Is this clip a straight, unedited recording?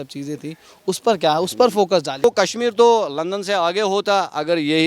no; 1 cut; at 2.2 s

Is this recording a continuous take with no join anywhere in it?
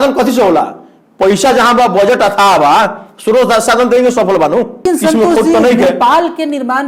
no; 1 cut; at 4.8 s

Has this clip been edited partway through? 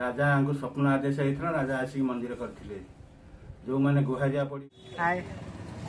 yes; 1 cut; at 4.5 s

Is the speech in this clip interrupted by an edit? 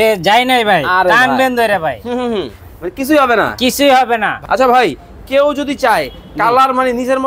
yes; 1 cut; at 4.3 s

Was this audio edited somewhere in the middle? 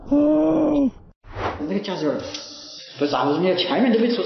yes; 1 cut; at 1.4 s

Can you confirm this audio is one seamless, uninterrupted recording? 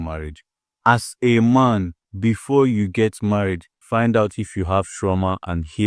no; 2 cuts; at 2.0 s, 3.7 s

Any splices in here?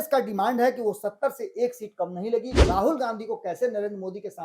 yes; 1 cut; at 2.5 s

